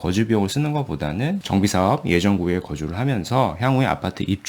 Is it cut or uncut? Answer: cut